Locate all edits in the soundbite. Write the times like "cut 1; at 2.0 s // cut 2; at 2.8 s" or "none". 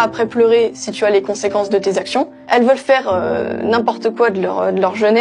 cut 1; at 2.1 s